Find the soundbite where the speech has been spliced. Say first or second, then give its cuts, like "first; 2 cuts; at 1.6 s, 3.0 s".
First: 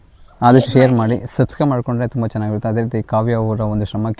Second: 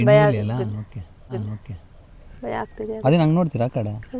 second; 1 cut; at 1.3 s